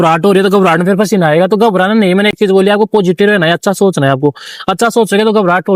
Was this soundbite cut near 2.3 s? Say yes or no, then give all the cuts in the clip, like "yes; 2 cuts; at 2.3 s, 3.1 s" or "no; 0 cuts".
no; 0 cuts